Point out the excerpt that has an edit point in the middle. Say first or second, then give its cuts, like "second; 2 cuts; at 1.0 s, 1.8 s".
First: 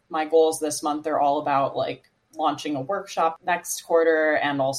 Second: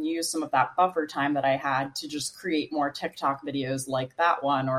first; 1 cut; at 3.4 s